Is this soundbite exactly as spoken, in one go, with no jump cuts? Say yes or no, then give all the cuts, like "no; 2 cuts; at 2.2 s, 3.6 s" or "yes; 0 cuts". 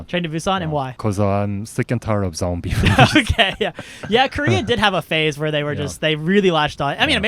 no; 1 cut; at 0.9 s